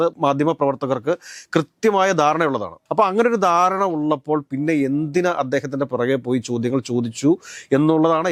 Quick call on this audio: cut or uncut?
uncut